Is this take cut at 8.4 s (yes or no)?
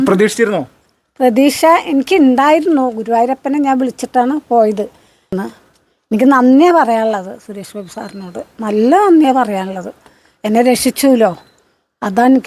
no